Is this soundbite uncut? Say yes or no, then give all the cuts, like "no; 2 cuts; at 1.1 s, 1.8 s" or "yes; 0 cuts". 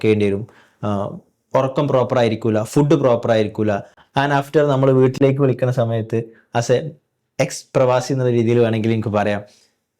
yes; 0 cuts